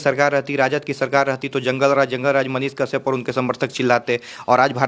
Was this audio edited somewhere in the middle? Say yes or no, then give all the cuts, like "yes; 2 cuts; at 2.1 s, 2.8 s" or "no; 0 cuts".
no; 0 cuts